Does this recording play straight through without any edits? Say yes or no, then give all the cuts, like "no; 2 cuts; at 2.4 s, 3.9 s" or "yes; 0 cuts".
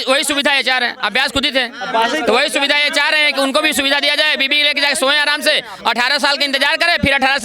yes; 0 cuts